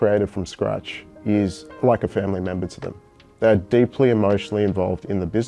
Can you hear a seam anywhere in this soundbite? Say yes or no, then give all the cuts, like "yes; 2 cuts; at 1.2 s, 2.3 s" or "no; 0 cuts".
no; 0 cuts